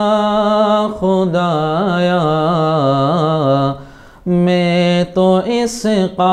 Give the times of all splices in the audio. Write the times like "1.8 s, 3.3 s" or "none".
none